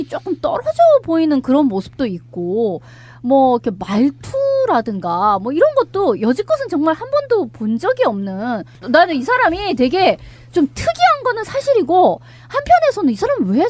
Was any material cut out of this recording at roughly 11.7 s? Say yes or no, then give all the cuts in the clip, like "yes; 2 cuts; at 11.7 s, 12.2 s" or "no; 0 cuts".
yes; 1 cut; at 11.7 s